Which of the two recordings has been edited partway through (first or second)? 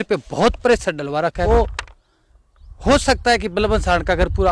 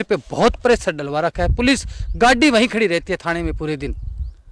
first